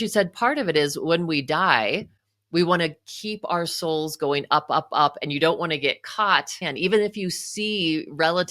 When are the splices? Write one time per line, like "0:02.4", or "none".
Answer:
0:06.6